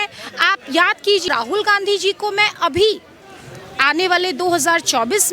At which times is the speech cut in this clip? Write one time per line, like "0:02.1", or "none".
0:01.2